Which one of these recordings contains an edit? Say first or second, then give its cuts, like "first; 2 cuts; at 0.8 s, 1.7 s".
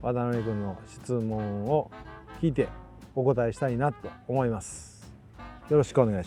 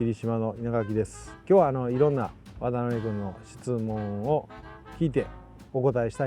second; 1 cut; at 1.3 s